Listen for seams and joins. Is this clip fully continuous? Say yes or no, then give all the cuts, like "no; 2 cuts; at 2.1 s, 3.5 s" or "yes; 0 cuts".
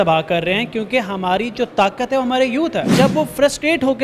no; 1 cut; at 2.9 s